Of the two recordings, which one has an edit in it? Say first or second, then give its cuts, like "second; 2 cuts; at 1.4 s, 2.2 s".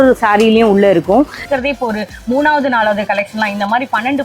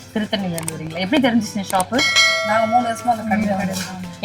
first; 1 cut; at 1.4 s